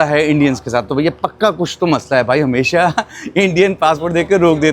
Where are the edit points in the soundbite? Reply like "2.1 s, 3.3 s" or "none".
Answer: none

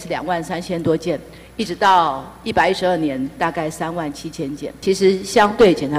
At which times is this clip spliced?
4.6 s

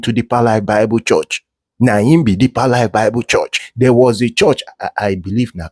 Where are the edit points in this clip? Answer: 3.6 s

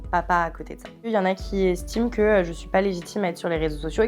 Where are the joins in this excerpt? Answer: 1.1 s

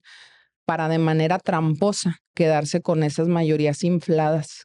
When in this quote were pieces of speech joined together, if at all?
none

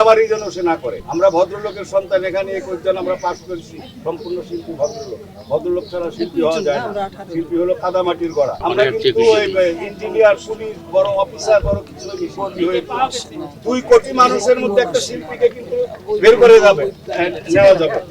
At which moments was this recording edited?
1.0 s, 8.6 s

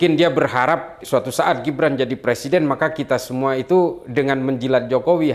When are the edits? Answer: 1.0 s

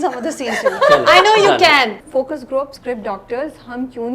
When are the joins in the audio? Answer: 2.0 s, 2.8 s

